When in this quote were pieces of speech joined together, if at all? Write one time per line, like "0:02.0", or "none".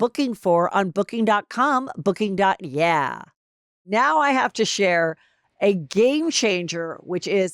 0:03.9